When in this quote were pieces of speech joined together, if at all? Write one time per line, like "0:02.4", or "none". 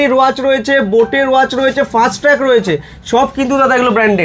none